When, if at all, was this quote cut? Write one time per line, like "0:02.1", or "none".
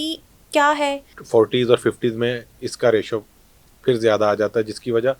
0:01.2

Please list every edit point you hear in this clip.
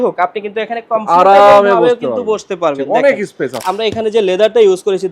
0:03.6

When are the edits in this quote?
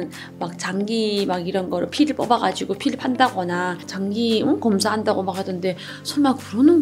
0:03.9

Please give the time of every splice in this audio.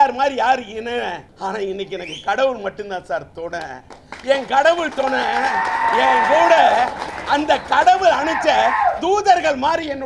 0:01.3

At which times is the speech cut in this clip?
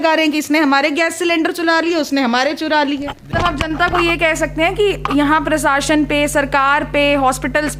0:03.3

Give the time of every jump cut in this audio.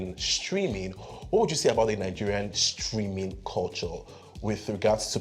none

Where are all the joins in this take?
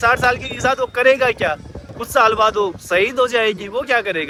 none

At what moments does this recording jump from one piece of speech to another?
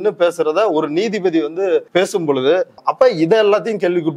0:01.9
0:02.7

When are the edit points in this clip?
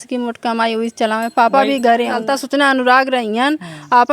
0:02.2

